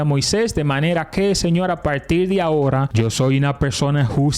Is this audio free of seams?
no; 1 cut; at 2.9 s

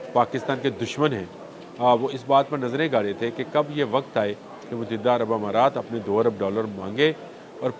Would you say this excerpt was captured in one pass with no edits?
yes; 0 cuts

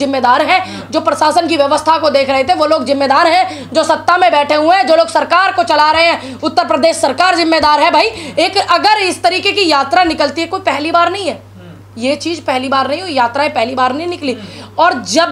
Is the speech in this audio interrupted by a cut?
no; 0 cuts

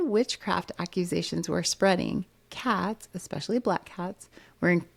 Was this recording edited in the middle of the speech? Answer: no; 0 cuts

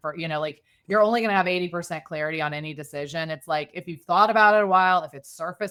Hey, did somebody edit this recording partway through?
no; 0 cuts

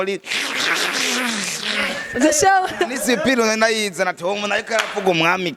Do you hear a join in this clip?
no; 0 cuts

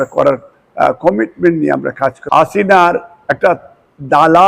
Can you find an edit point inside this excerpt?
yes; 1 cut; at 2.2 s

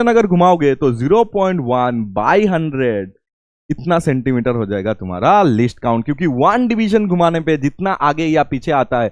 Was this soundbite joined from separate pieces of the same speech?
no; 0 cuts

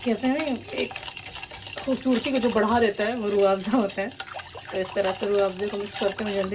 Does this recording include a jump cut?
no; 0 cuts

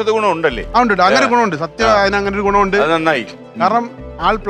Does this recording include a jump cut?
no; 0 cuts

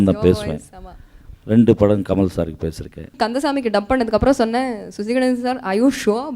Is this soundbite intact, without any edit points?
no; 1 cut; at 3.1 s

